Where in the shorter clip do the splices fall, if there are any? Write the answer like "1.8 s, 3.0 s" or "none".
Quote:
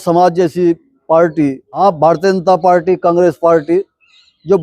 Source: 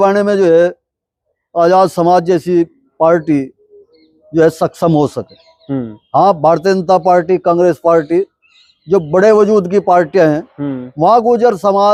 1.8 s